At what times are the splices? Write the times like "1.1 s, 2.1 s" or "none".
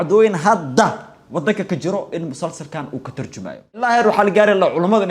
3.8 s